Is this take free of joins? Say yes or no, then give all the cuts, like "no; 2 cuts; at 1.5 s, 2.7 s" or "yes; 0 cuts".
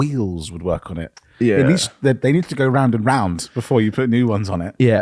yes; 0 cuts